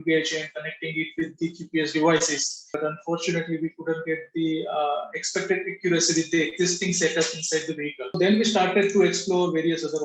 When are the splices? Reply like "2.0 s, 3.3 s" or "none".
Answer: 2.7 s, 8.1 s